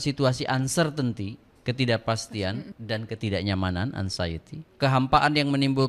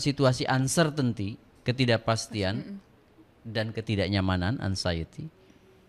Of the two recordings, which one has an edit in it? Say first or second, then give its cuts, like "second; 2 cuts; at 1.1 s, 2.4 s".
first; 2 cuts; at 2.7 s, 4.7 s